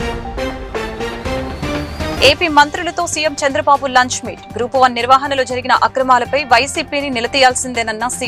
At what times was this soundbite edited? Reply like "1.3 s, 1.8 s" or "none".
none